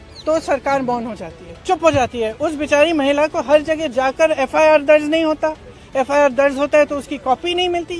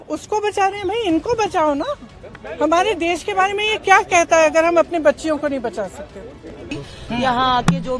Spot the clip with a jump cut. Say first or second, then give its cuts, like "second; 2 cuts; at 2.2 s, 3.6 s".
second; 1 cut; at 6.8 s